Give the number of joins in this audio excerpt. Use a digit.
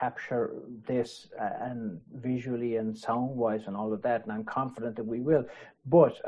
0